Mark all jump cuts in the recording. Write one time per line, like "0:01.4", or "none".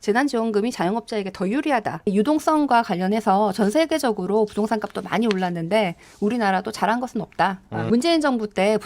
0:02.1
0:07.9